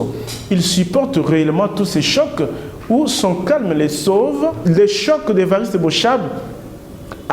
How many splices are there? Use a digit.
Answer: 1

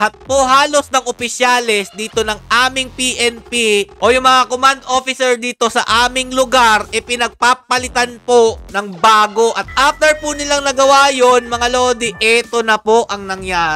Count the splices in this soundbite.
0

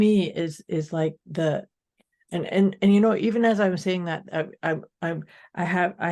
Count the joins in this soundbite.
1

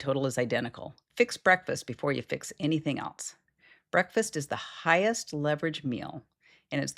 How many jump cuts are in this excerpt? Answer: 1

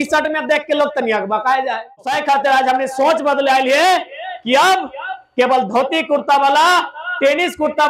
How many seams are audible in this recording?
1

